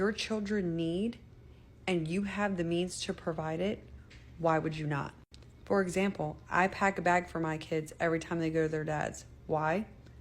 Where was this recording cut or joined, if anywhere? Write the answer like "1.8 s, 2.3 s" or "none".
5.8 s

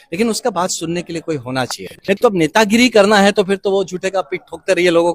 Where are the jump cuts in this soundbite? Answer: 2.2 s

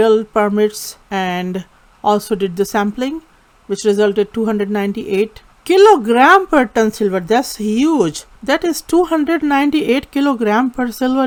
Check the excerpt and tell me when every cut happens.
none

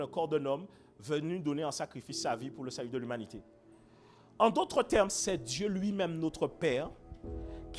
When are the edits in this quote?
none

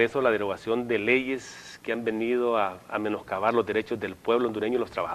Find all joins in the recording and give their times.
3.7 s

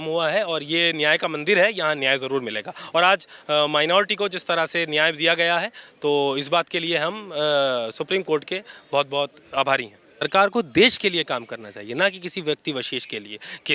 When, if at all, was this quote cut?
10.2 s

